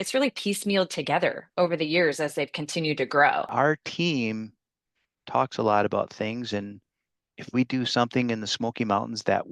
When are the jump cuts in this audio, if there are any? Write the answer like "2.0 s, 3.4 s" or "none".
3.5 s